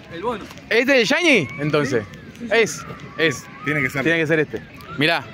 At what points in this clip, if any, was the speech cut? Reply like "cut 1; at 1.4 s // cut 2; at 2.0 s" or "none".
none